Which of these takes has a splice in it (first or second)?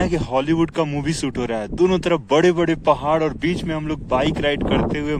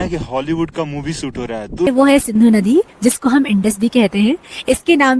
second